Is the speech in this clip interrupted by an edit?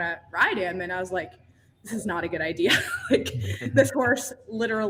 no; 0 cuts

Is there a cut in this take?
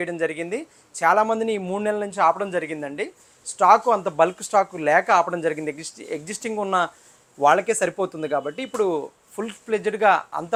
no; 0 cuts

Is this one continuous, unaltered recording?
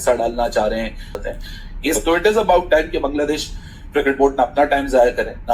no; 1 cut; at 1.3 s

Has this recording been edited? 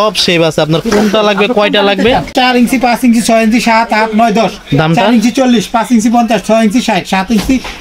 yes; 1 cut; at 2.3 s

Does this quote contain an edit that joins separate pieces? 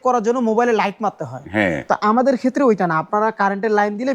no; 0 cuts

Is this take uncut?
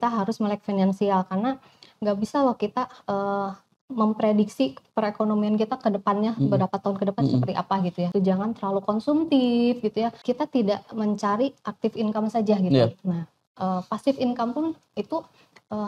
no; 2 cuts; at 8.1 s, 10.2 s

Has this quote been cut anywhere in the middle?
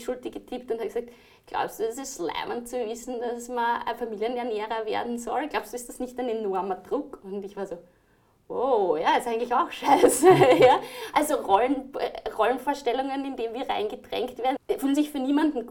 yes; 1 cut; at 14.6 s

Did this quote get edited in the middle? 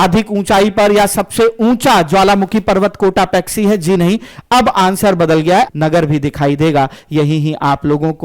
yes; 1 cut; at 5.7 s

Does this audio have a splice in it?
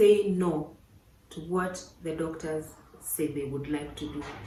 no; 0 cuts

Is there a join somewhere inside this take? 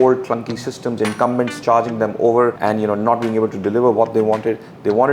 yes; 1 cut; at 2.6 s

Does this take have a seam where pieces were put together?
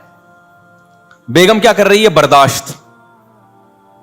yes; 1 cut; at 3.0 s

